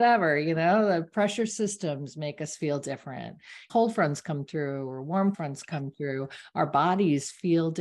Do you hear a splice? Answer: yes; 2 cuts; at 3.6 s, 5.4 s

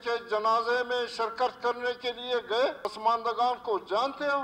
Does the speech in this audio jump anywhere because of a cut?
yes; 1 cut; at 2.9 s

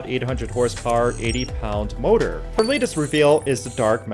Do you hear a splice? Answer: yes; 1 cut; at 2.5 s

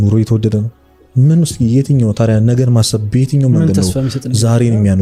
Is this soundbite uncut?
yes; 0 cuts

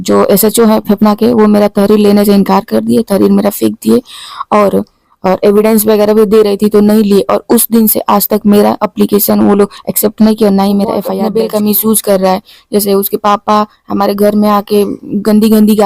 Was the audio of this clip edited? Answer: yes; 1 cut; at 11.1 s

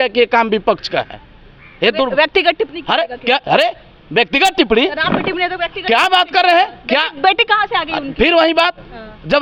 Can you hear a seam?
no; 0 cuts

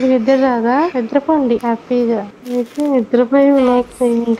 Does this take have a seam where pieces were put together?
yes; 1 cut; at 2.4 s

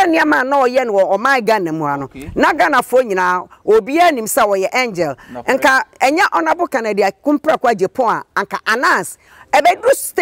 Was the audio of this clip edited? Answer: no; 0 cuts

